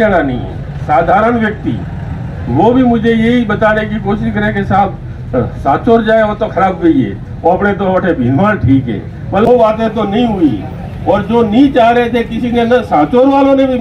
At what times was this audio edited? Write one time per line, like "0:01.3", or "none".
0:09.5